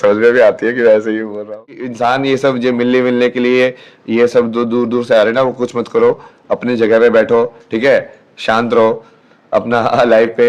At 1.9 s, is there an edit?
yes; 1 cut; at 1.9 s

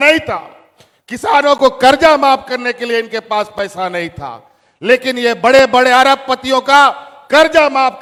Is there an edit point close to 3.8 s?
no; 0 cuts

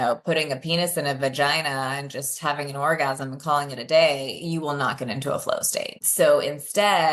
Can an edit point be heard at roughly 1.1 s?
no; 1 cut; at 6.0 s

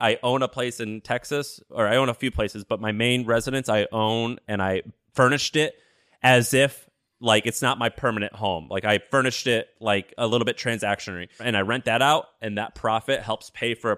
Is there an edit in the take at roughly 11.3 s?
yes; 1 cut; at 11.3 s

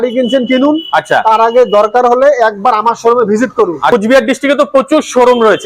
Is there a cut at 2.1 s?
no; 1 cut; at 3.9 s

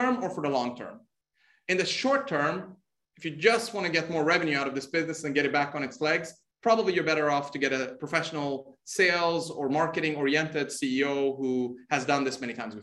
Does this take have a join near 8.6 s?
no; 0 cuts

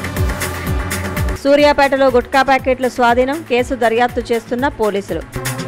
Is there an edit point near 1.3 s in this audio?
no; 0 cuts

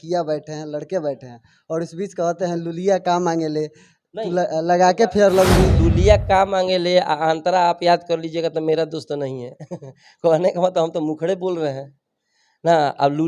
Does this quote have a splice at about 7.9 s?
no; 1 cut; at 5.8 s

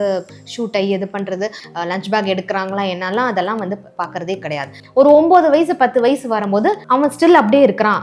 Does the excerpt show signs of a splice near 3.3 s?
no; 3 cuts; at 1.6 s, 4.8 s, 6.8 s

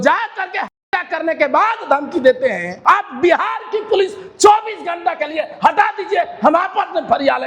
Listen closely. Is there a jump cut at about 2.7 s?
yes; 1 cut; at 2.7 s

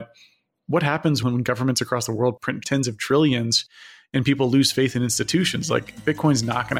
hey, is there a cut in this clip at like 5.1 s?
no; 2 cuts; at 1.2 s, 2.6 s

